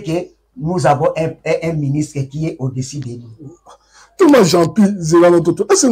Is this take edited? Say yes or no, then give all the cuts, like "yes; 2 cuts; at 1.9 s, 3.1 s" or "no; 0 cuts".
no; 0 cuts